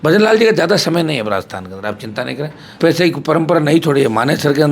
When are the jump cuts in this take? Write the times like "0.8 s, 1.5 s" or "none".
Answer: 2.8 s